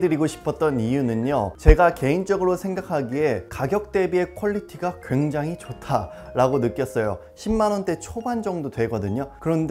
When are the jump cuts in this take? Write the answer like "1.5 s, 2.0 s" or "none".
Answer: 1.5 s